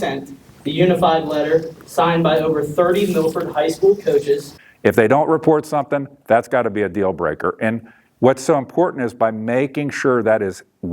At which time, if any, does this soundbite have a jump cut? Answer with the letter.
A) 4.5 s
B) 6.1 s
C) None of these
A